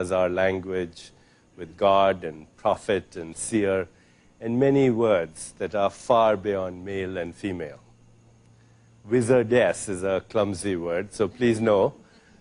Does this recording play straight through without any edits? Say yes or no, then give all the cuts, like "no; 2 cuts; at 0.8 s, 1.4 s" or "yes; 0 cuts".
yes; 0 cuts